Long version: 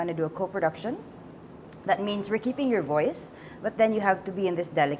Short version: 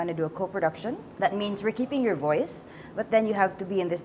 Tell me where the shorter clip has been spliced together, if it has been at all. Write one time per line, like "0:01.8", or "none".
0:01.1